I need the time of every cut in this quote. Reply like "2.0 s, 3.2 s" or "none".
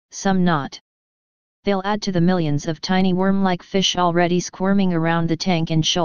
2.3 s